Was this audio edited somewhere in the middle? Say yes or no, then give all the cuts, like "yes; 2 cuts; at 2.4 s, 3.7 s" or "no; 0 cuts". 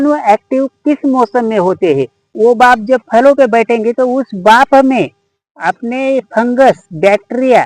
yes; 1 cut; at 2.3 s